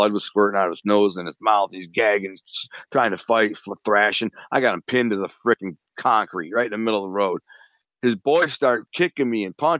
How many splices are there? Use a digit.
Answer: 0